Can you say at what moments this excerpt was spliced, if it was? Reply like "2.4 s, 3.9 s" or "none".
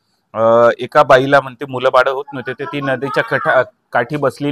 none